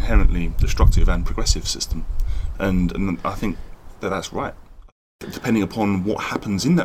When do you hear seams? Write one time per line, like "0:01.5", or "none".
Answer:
0:05.0